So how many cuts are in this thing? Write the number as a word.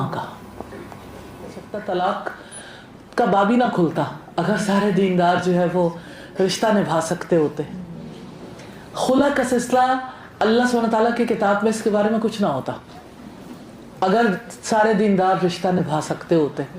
one